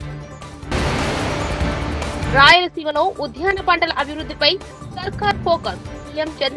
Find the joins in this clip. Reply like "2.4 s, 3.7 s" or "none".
0.7 s, 2.2 s